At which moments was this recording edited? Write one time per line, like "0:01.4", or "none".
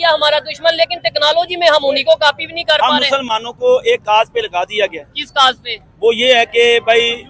none

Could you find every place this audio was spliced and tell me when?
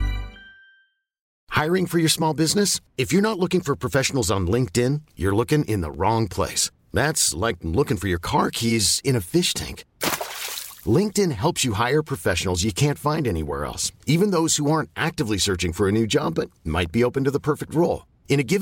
0:01.4

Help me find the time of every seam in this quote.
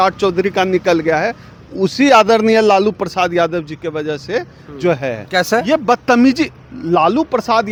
none

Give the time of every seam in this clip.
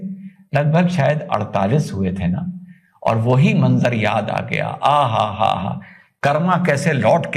none

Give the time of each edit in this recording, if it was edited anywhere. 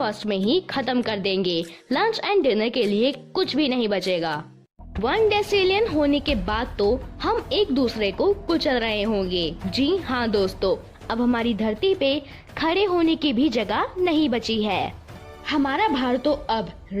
0:04.9
0:15.1

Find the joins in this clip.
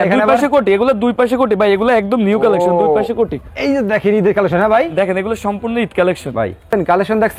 none

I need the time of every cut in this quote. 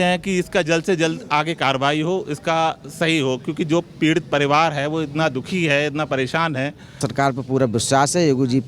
0:07.0

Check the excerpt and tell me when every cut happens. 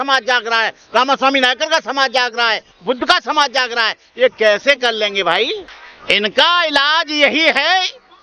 0:05.8

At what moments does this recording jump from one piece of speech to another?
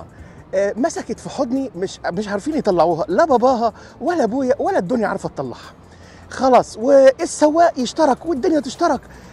none

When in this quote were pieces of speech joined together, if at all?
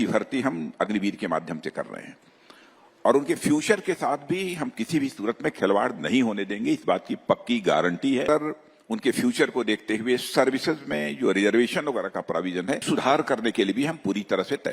0:08.3
0:12.8

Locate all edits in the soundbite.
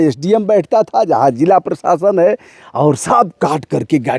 none

